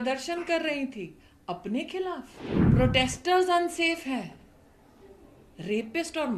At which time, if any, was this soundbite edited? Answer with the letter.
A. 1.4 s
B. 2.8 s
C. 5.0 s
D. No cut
B